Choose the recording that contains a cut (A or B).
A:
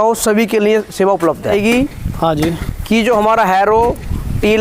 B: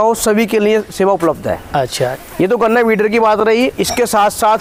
A